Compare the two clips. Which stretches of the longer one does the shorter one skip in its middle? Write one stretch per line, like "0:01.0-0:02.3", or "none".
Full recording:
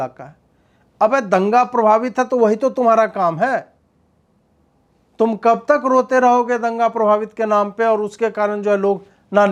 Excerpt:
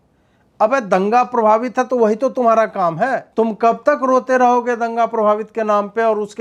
0:03.7-0:05.1